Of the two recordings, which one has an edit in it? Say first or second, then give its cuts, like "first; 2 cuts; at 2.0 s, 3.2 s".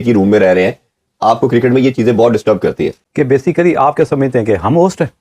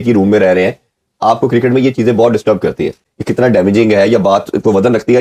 first; 1 cut; at 3.0 s